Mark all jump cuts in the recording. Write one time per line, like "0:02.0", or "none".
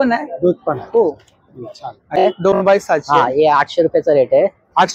0:02.2